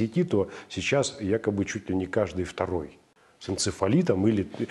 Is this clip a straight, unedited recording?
yes; 0 cuts

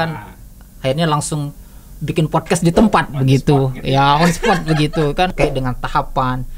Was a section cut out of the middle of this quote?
yes; 1 cut; at 5.3 s

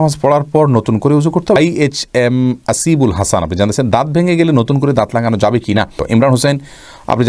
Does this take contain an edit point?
yes; 2 cuts; at 1.6 s, 6.0 s

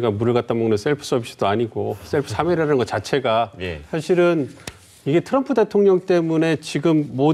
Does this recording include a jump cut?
no; 0 cuts

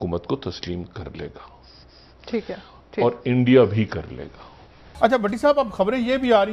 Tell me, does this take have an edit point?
yes; 1 cut; at 4.9 s

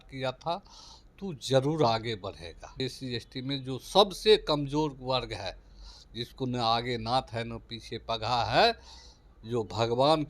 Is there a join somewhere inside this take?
yes; 1 cut; at 2.8 s

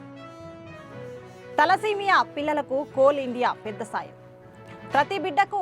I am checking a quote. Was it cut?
yes; 1 cut; at 1.1 s

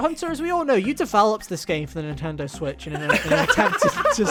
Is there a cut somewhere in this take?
no; 0 cuts

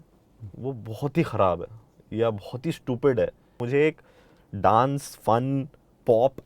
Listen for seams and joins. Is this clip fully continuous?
no; 1 cut; at 3.6 s

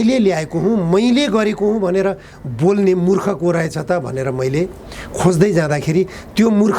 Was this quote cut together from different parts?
no; 0 cuts

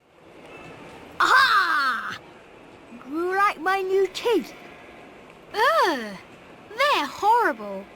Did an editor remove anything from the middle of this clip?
yes; 1 cut; at 1.2 s

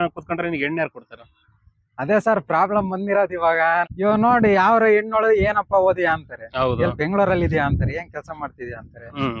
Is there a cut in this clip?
yes; 1 cut; at 3.9 s

